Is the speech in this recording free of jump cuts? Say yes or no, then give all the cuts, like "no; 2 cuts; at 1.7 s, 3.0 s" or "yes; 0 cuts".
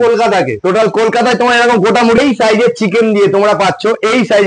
no; 1 cut; at 2.2 s